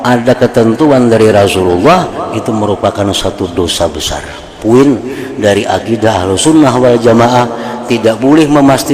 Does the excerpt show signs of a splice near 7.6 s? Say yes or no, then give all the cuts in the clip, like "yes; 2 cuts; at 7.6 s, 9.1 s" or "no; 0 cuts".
no; 1 cut; at 4.6 s